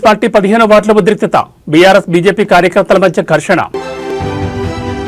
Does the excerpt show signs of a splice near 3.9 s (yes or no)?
yes